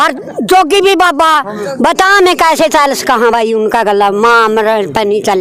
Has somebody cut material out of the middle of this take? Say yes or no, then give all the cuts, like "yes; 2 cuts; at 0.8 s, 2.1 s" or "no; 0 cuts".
no; 0 cuts